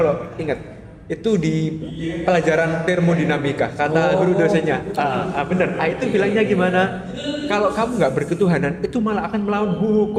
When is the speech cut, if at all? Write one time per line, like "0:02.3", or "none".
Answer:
none